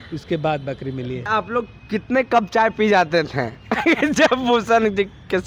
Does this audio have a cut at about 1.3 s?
yes; 1 cut; at 1.3 s

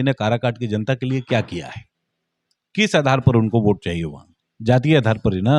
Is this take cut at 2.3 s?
no; 0 cuts

